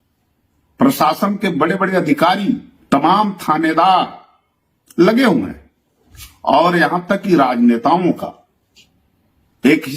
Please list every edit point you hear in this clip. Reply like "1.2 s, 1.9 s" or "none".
2.7 s